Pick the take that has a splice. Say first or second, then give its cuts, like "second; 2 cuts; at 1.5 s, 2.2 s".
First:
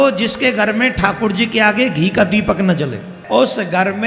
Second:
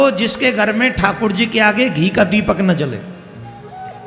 first; 1 cut; at 3.1 s